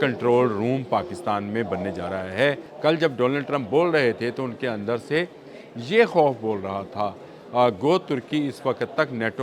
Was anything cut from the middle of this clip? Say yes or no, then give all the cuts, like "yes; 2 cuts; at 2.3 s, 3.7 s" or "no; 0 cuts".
yes; 1 cut; at 2.7 s